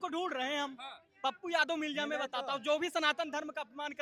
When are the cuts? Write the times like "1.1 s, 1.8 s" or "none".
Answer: none